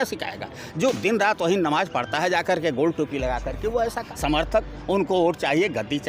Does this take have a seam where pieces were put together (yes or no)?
yes